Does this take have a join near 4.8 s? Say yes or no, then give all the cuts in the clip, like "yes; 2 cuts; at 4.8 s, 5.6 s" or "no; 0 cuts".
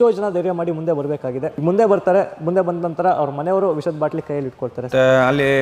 yes; 2 cuts; at 1.5 s, 4.8 s